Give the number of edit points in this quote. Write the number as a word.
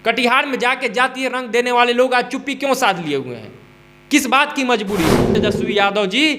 one